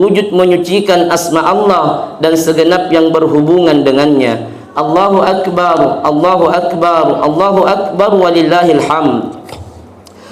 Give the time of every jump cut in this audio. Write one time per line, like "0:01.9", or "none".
none